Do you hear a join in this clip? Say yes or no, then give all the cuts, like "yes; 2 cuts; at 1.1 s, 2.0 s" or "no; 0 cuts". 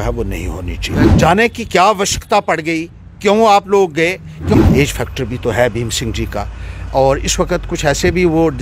yes; 2 cuts; at 1.0 s, 4.5 s